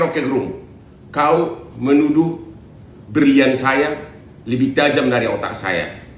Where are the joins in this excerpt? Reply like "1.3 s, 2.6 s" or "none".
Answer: 1.3 s